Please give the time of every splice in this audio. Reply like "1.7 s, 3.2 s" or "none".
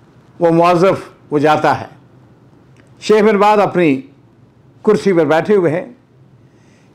none